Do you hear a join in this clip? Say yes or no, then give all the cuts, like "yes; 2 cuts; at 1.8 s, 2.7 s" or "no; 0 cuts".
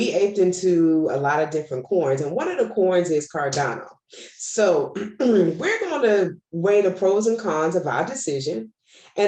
no; 0 cuts